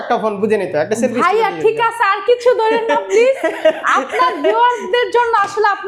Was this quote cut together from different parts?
no; 0 cuts

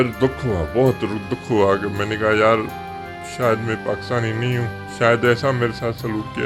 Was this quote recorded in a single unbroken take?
yes; 0 cuts

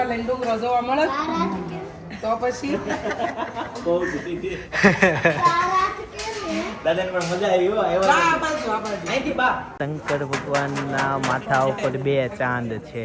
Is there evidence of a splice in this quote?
yes; 1 cut; at 9.7 s

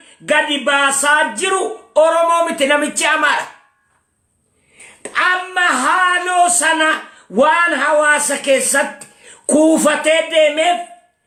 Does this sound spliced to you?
no; 0 cuts

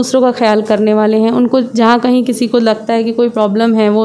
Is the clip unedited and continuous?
yes; 0 cuts

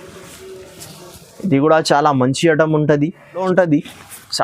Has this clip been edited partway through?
yes; 1 cut; at 3.4 s

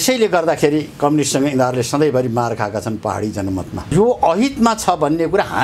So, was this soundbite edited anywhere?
yes; 1 cut; at 3.8 s

